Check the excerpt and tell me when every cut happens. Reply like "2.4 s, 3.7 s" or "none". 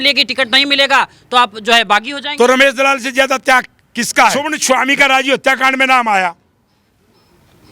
4.6 s